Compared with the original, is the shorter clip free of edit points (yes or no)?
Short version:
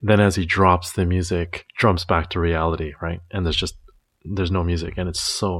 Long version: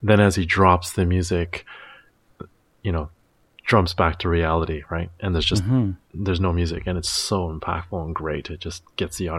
no